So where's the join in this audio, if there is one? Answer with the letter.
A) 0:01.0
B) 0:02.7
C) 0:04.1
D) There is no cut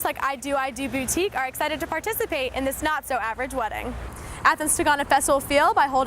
C